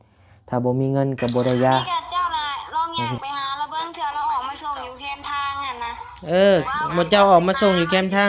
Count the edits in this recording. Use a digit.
1